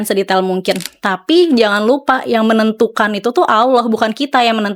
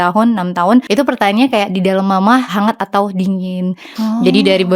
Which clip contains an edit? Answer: second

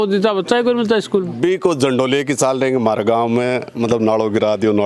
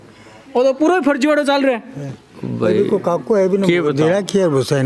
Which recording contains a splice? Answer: first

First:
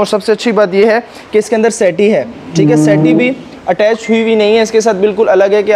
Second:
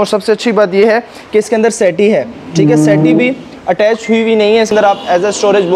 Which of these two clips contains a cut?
second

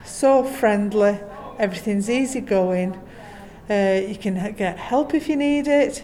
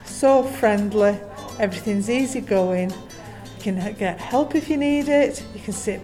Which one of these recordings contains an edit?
second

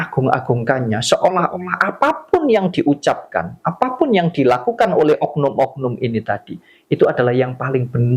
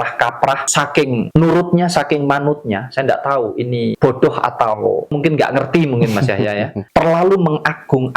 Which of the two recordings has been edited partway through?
second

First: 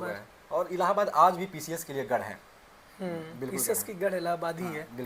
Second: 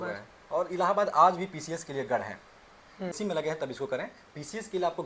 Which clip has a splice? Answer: second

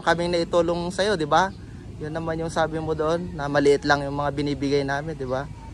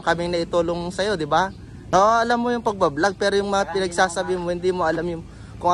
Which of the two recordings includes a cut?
second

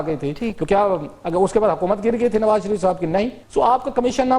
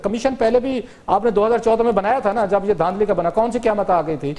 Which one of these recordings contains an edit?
first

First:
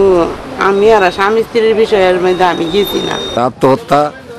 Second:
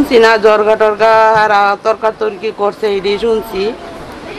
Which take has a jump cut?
first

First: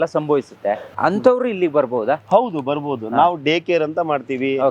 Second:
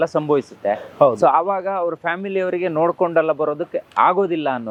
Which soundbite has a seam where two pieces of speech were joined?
first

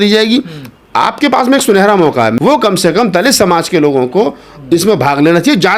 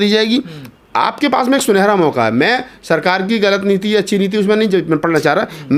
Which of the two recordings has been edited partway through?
first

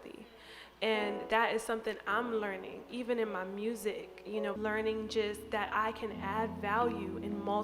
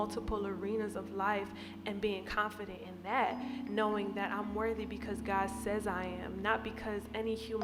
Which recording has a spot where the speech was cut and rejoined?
first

